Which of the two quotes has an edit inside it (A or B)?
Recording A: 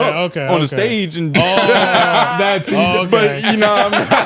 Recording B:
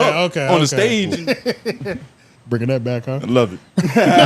B